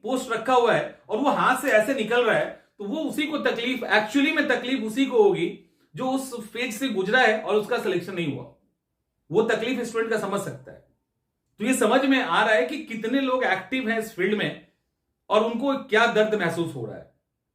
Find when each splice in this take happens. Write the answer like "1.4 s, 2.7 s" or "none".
none